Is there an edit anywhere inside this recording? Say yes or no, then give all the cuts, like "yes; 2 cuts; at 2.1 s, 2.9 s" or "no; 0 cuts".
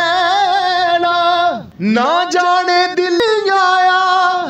yes; 2 cuts; at 1.7 s, 3.2 s